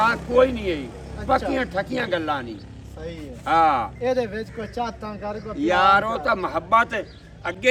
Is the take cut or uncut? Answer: uncut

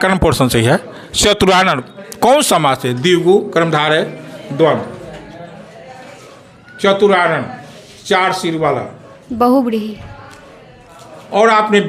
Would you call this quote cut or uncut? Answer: uncut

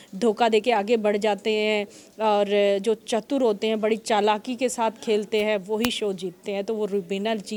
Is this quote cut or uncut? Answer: uncut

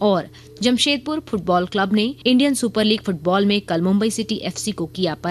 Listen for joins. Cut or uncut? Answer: cut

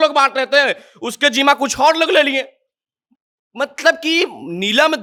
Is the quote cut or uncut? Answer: uncut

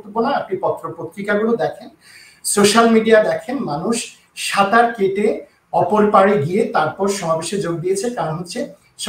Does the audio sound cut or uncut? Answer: uncut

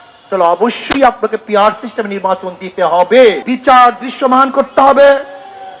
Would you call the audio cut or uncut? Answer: cut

